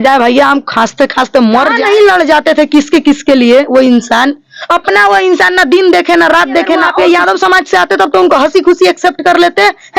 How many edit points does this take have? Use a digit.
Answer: 2